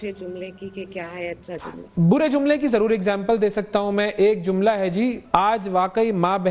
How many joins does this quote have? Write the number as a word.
one